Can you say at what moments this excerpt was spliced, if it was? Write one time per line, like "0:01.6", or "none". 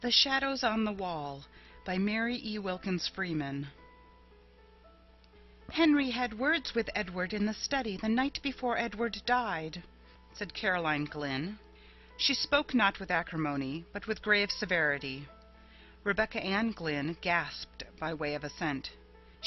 0:18.4